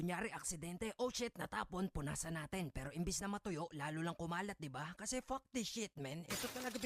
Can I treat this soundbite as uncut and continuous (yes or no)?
yes